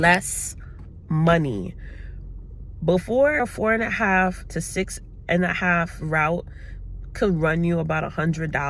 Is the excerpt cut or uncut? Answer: cut